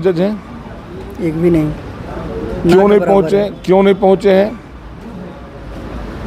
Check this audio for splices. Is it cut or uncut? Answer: uncut